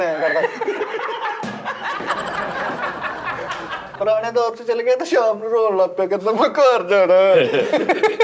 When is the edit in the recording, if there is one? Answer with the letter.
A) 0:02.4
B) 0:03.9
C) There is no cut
B